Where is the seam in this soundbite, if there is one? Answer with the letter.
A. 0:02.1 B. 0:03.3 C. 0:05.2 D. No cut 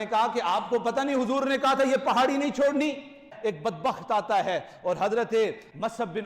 B